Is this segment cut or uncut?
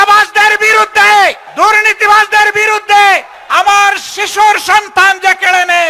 cut